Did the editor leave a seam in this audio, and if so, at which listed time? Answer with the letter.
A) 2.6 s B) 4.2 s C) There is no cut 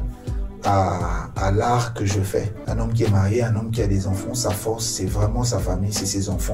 A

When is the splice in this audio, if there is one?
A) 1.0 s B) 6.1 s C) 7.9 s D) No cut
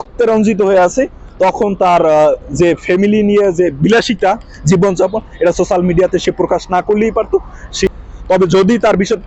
C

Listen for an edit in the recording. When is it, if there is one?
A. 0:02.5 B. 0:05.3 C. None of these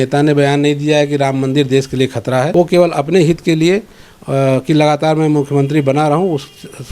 A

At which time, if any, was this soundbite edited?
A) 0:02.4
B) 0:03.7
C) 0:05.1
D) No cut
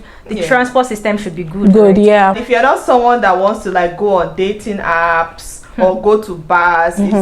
A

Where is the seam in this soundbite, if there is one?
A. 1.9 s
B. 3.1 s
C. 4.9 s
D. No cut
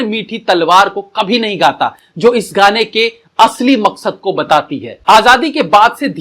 C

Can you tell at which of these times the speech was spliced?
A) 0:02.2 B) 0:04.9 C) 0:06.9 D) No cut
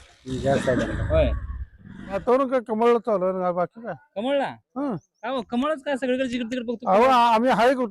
A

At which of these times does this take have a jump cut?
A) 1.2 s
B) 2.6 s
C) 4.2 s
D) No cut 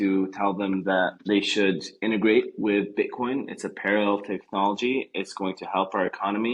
A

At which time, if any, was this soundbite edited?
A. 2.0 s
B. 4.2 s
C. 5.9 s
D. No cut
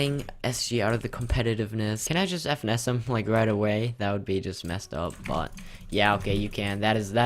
A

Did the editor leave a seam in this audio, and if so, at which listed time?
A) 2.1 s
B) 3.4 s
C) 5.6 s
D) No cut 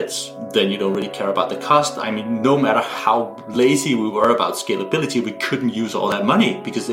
D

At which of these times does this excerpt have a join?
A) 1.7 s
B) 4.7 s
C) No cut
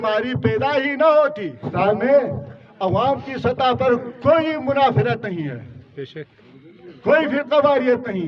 A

